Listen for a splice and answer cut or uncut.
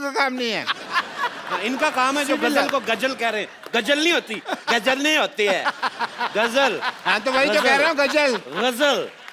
uncut